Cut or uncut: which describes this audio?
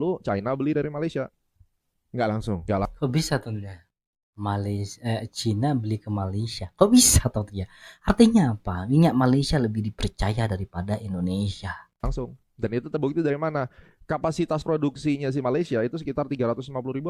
uncut